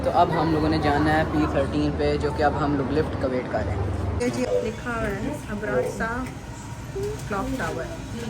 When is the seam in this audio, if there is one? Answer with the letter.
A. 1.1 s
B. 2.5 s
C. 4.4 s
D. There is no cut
C